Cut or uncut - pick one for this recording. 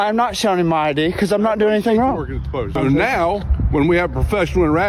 cut